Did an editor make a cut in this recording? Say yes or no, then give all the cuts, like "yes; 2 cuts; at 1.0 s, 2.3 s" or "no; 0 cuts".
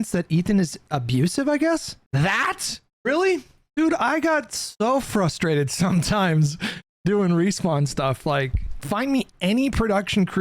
yes; 3 cuts; at 2.0 s, 3.7 s, 8.7 s